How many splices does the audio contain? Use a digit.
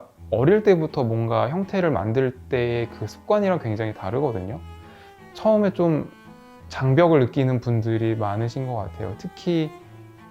1